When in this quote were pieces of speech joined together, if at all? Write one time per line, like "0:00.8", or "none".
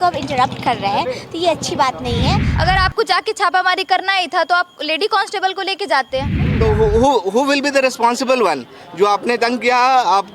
0:02.5
0:06.4